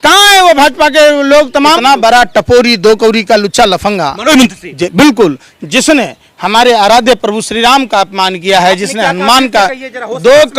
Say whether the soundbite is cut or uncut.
cut